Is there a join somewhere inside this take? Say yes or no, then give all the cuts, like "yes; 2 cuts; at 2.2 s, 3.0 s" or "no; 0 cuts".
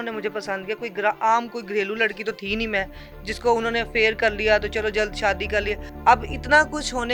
yes; 1 cut; at 5.9 s